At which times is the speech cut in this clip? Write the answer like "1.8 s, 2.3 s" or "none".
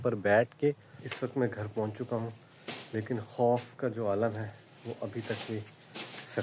1.0 s